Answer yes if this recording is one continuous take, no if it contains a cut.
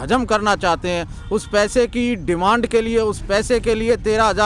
yes